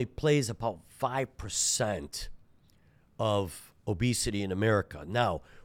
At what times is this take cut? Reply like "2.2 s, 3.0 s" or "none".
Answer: none